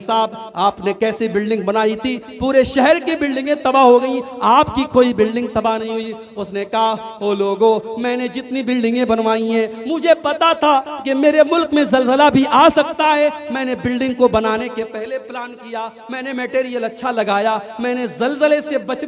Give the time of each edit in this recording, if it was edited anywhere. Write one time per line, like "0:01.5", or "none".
none